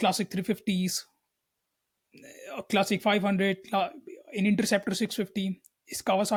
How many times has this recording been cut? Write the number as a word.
zero